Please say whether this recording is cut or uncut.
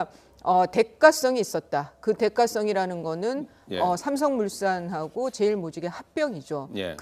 cut